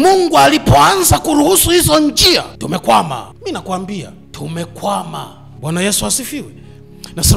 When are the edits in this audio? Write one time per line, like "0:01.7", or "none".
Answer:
0:02.5
0:03.3
0:04.2
0:05.4